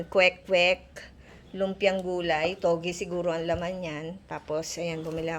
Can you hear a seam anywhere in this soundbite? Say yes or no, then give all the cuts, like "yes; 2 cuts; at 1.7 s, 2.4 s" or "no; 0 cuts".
no; 0 cuts